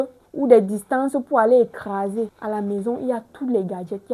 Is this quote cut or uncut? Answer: cut